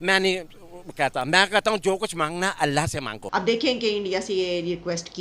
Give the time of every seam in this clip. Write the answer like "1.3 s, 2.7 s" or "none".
3.2 s